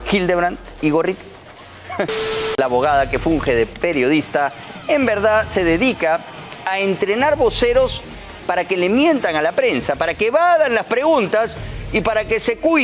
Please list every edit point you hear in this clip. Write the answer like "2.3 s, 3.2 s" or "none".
2.5 s